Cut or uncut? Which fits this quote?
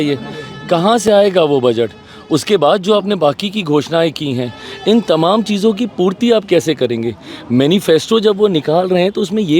uncut